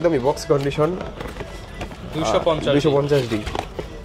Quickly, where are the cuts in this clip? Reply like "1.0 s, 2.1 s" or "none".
none